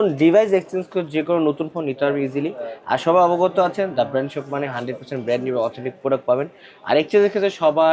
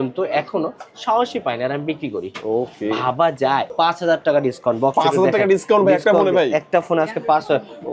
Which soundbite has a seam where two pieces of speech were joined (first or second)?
second